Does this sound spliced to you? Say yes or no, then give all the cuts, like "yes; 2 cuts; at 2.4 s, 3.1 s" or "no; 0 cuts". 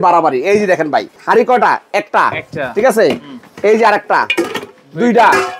no; 0 cuts